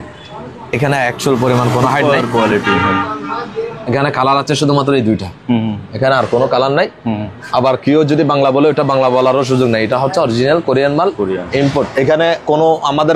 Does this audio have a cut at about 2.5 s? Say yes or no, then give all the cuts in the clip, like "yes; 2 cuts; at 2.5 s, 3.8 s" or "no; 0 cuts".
no; 0 cuts